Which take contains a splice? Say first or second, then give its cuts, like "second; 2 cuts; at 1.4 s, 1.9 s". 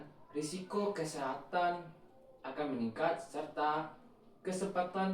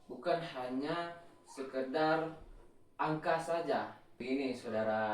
second; 1 cut; at 4.1 s